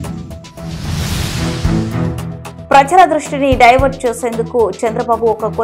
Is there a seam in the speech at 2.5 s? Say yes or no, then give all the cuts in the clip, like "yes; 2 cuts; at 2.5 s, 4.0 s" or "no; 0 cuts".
no; 0 cuts